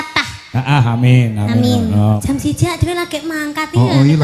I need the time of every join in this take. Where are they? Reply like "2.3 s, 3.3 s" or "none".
2.0 s